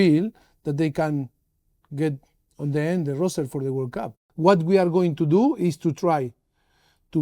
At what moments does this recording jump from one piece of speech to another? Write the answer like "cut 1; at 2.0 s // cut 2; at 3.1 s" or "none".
cut 1; at 4.2 s